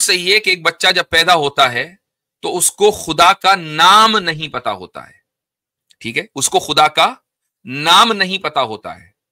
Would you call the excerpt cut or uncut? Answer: uncut